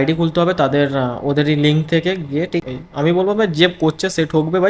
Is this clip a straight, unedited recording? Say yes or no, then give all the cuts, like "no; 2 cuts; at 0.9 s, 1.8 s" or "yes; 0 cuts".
no; 1 cut; at 2.6 s